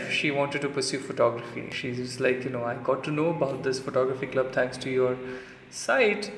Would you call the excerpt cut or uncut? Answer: cut